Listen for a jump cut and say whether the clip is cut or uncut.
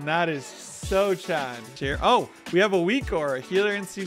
cut